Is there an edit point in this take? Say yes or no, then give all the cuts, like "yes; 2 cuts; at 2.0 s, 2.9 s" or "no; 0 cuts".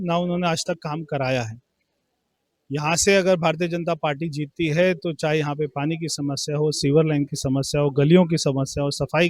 no; 0 cuts